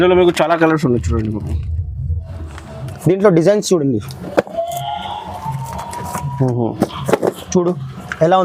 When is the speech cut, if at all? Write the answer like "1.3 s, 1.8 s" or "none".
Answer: 2.9 s